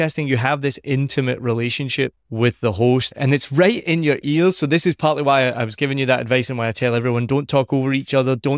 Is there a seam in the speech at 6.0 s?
no; 2 cuts; at 2.2 s, 3.1 s

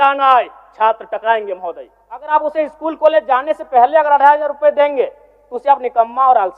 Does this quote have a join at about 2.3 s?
yes; 1 cut; at 2.3 s

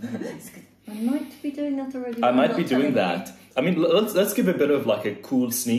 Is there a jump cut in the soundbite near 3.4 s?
yes; 1 cut; at 3.4 s

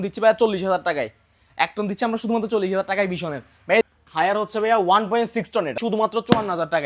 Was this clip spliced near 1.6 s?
no; 2 cuts; at 3.9 s, 5.8 s

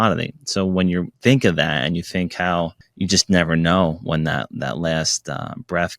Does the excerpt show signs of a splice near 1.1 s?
yes; 2 cuts; at 1.1 s, 2.8 s

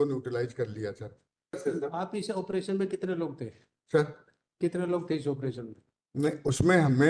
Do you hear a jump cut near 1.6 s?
yes; 1 cut; at 1.6 s

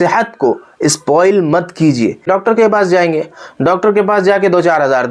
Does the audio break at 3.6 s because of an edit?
no; 1 cut; at 2.3 s

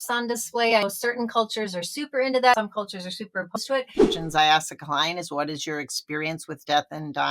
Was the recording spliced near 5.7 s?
no; 2 cuts; at 2.6 s, 4.2 s

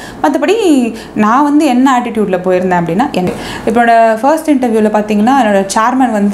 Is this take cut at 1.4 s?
no; 1 cut; at 3.2 s

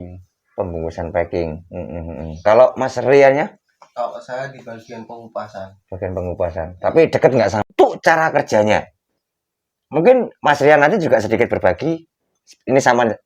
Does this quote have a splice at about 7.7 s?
yes; 1 cut; at 7.7 s

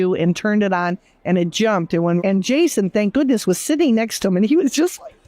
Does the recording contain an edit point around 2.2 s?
yes; 1 cut; at 2.2 s

